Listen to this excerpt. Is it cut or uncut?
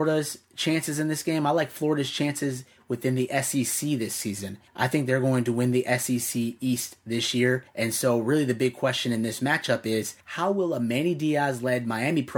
uncut